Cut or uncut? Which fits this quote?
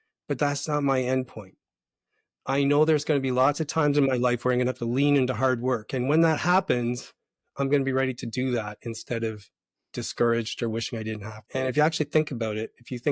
uncut